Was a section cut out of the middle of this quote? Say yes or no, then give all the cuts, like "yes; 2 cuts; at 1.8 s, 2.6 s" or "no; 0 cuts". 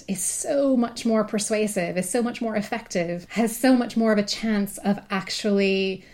yes; 1 cut; at 3.2 s